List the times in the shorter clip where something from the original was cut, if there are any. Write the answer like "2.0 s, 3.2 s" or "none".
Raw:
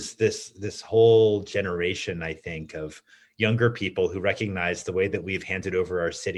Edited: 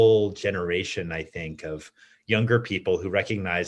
none